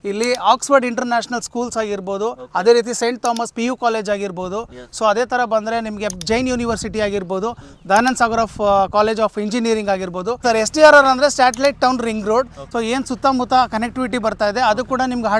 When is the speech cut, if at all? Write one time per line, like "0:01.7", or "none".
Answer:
0:10.4
0:12.6